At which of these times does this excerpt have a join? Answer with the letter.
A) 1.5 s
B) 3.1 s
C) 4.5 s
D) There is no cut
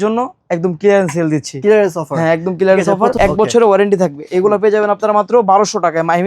B